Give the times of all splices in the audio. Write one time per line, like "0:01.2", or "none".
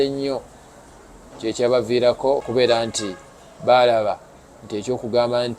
0:02.5